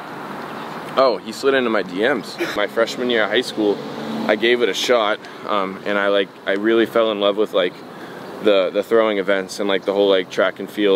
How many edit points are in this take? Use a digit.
1